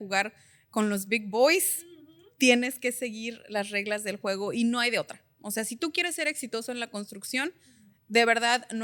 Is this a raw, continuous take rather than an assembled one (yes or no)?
yes